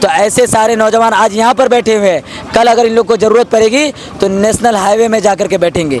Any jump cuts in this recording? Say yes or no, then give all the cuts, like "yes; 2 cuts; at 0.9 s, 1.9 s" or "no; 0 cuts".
no; 0 cuts